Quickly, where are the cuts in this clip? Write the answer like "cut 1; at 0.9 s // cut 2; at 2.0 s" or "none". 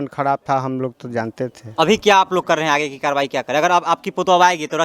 cut 1; at 1.8 s